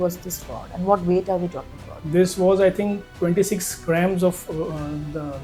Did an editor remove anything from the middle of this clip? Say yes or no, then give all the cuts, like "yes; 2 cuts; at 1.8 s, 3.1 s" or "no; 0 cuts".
no; 0 cuts